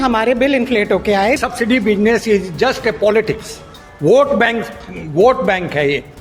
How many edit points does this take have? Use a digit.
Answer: 1